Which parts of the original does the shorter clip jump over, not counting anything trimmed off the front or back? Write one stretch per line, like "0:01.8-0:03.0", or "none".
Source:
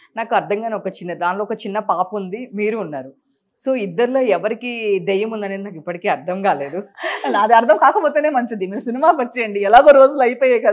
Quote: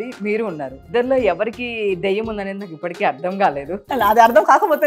0:03.2-0:03.9
0:06.9-0:07.2